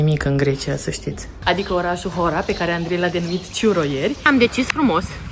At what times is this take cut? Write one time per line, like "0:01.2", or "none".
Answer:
0:01.2
0:04.2